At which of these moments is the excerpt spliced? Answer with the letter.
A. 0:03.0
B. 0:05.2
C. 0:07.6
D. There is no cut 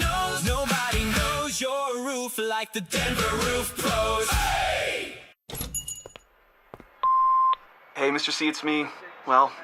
B